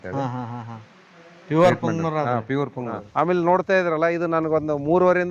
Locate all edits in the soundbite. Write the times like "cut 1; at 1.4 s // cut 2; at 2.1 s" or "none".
cut 1; at 3.2 s